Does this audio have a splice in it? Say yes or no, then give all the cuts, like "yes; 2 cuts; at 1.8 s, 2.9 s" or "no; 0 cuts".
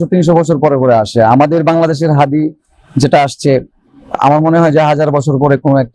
no; 0 cuts